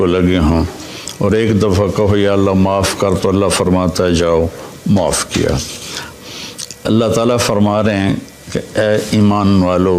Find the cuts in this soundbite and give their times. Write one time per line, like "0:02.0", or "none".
0:06.1

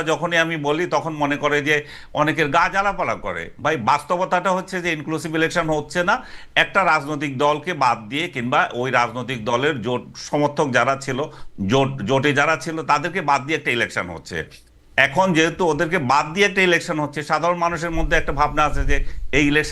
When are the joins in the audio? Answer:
none

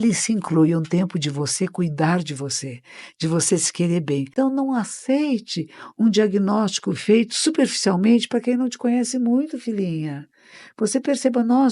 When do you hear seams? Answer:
0:04.3

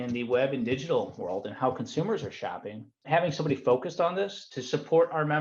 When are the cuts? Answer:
0:03.0
0:04.4

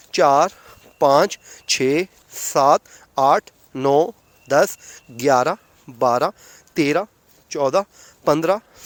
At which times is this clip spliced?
none

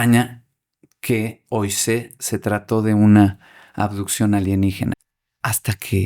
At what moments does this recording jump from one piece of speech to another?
0:04.9

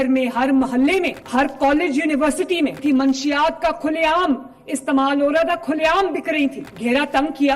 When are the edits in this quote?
0:01.2
0:02.8
0:06.7

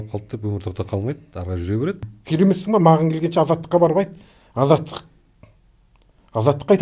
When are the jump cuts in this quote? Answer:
0:02.0

